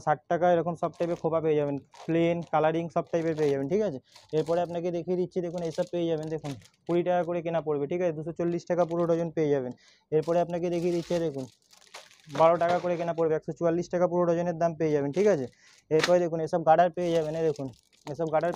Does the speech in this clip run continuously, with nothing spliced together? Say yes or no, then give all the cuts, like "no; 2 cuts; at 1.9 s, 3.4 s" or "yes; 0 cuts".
yes; 0 cuts